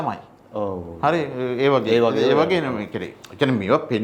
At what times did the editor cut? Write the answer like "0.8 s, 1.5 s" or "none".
none